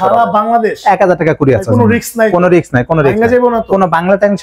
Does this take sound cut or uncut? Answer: uncut